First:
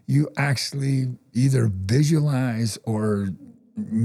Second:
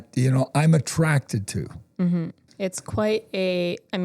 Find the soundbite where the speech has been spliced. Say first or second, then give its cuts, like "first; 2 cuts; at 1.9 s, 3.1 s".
second; 1 cut; at 2.4 s